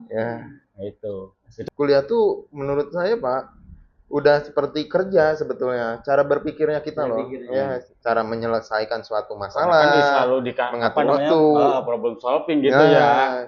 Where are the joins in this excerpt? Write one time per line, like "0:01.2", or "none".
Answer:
0:01.5